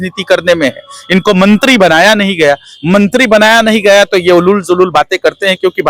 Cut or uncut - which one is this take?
uncut